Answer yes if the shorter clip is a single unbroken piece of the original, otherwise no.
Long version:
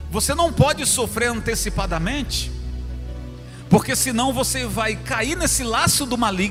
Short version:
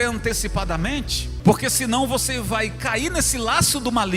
no